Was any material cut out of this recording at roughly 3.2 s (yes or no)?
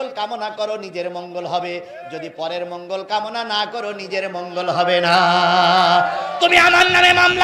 no